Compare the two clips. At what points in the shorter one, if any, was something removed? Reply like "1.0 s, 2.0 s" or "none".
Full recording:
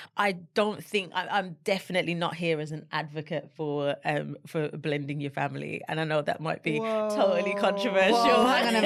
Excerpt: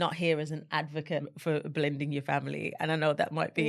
1.3 s